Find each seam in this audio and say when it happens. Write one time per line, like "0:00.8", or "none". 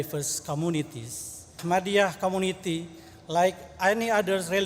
0:01.6